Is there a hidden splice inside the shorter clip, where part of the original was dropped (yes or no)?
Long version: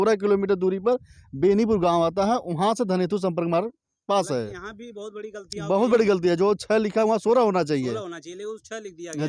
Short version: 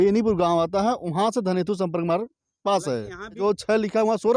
yes